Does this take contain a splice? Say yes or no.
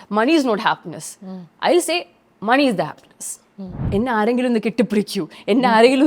yes